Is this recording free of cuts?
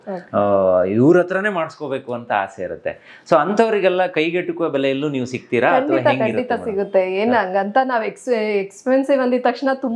yes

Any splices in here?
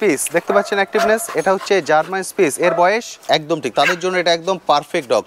yes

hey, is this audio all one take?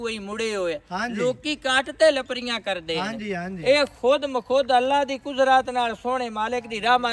yes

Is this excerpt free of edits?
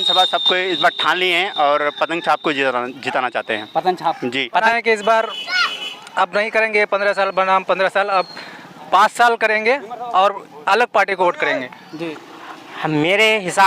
no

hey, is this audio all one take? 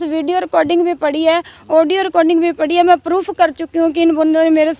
yes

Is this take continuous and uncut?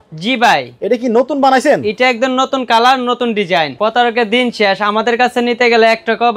no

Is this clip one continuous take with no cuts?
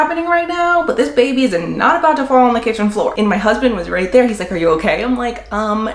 no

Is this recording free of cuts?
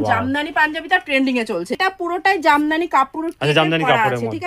no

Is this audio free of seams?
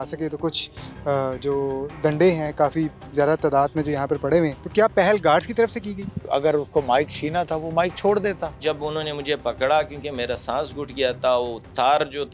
no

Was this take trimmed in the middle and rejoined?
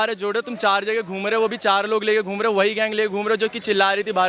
no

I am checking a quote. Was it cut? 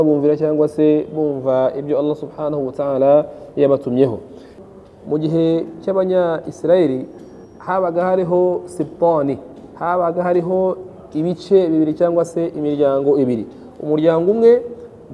yes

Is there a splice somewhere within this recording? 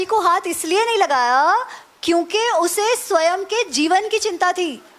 no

